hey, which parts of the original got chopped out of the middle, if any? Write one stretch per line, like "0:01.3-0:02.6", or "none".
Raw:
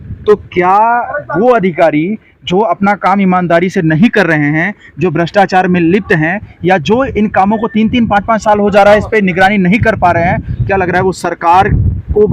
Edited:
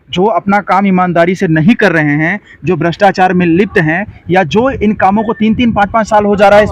none